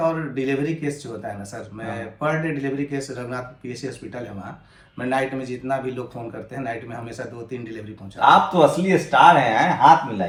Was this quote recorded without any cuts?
yes; 0 cuts

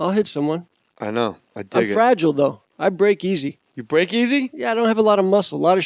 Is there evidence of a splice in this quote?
no; 0 cuts

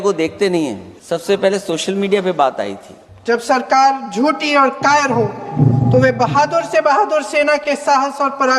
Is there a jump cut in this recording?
yes; 2 cuts; at 0.9 s, 3.1 s

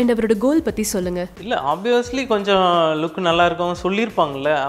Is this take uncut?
yes; 0 cuts

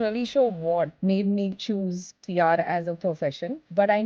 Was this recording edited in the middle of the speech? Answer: yes; 1 cut; at 0.9 s

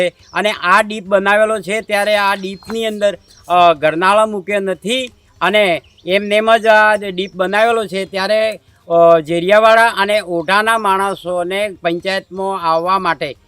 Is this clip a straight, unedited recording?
yes; 0 cuts

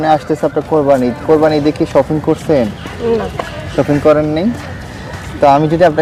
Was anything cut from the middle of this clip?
no; 0 cuts

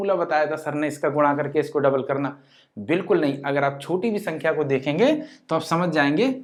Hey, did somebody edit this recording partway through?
no; 0 cuts

